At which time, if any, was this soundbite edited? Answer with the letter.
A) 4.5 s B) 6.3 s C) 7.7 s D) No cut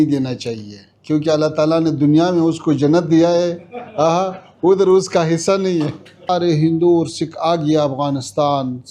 B